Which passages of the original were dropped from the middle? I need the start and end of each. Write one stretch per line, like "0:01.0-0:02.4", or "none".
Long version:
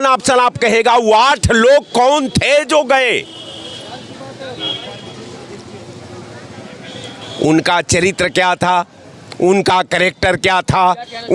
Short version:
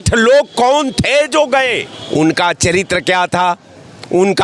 0:03.3-0:07.2